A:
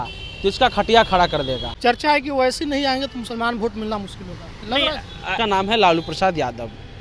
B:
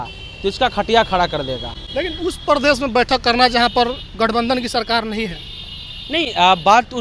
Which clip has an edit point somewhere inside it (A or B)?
A